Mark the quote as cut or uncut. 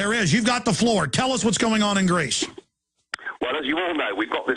uncut